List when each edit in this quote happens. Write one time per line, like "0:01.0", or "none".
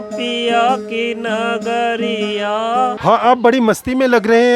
none